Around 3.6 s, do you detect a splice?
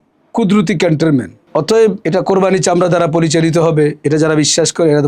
no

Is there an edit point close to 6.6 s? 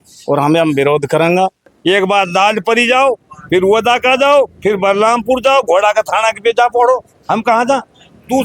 no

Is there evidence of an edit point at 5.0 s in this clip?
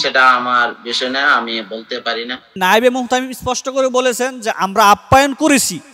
no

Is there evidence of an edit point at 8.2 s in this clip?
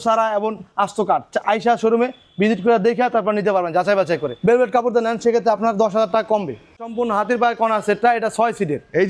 no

